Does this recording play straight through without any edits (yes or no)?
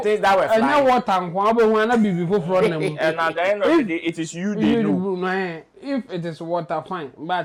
yes